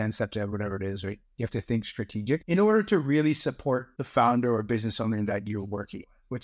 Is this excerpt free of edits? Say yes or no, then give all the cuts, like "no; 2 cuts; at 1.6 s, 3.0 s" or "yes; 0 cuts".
no; 2 cuts; at 2.4 s, 4.0 s